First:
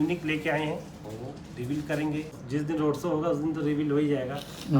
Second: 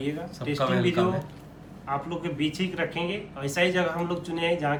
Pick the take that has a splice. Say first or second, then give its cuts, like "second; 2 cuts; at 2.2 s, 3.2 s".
first; 1 cut; at 2.4 s